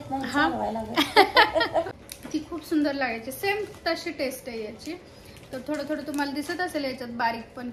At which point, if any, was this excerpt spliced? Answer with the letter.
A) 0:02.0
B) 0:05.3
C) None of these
A